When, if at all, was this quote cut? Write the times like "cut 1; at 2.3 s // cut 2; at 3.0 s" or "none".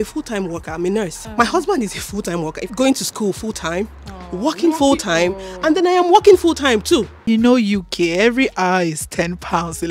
cut 1; at 1.2 s // cut 2; at 2.7 s // cut 3; at 7.1 s